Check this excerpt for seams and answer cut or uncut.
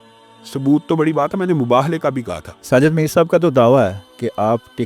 cut